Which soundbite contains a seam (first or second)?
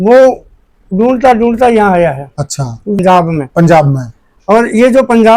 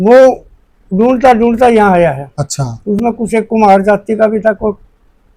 first